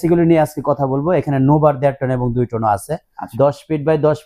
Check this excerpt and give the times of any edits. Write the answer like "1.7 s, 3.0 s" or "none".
3.2 s